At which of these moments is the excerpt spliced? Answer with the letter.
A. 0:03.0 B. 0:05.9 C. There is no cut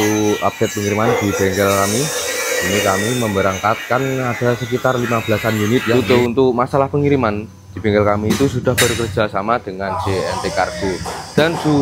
B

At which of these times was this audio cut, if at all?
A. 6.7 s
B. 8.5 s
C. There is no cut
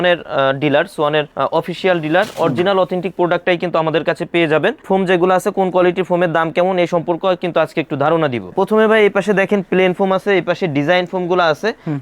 B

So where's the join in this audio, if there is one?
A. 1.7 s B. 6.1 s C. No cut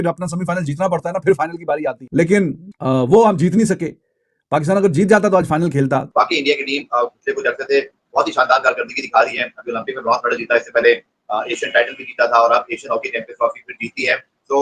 B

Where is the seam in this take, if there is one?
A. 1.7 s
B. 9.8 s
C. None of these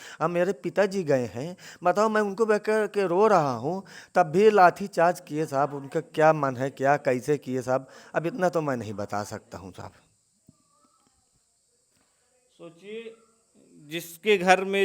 C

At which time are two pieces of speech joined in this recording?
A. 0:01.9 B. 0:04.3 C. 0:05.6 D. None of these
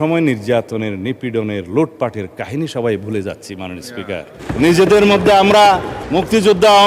B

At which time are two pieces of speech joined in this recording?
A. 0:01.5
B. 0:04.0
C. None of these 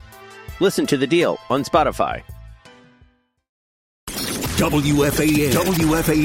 B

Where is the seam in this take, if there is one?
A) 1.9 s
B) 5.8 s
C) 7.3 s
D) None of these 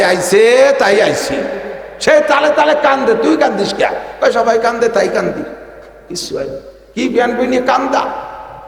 D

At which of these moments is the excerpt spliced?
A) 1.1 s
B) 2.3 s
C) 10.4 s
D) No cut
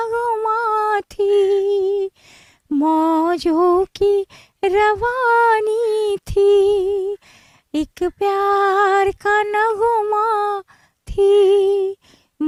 D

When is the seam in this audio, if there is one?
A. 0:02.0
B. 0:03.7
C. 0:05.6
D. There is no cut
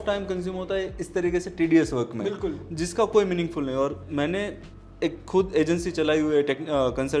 D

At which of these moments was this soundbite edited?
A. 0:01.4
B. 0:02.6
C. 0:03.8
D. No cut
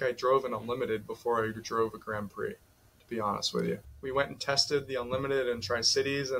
C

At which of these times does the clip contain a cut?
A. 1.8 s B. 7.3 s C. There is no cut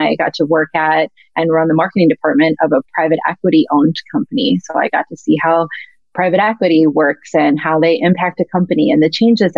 C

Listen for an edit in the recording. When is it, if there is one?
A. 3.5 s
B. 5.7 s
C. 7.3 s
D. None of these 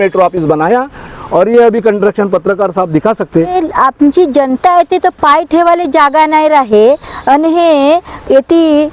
A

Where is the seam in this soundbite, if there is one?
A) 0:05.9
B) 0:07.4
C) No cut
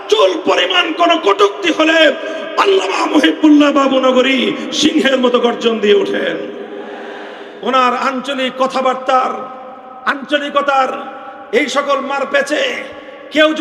B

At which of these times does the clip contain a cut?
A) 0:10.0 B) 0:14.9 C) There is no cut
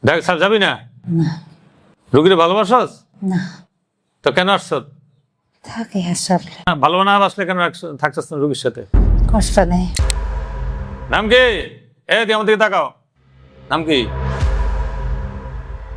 A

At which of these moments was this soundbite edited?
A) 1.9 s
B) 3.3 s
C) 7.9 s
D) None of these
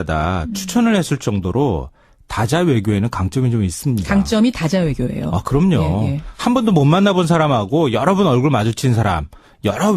B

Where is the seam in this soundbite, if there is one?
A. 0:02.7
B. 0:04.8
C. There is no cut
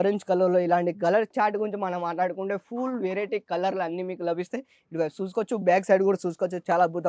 C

